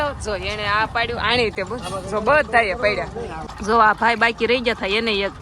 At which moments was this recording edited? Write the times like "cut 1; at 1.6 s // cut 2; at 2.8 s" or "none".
cut 1; at 3.4 s